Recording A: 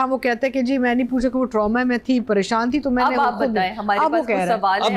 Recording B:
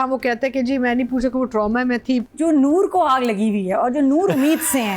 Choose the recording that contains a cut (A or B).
B